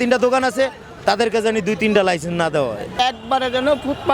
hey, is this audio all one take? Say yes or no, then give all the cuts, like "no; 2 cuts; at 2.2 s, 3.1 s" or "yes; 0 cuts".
no; 1 cut; at 3.0 s